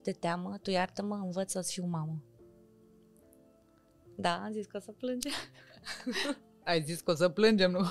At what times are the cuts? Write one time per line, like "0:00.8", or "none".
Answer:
none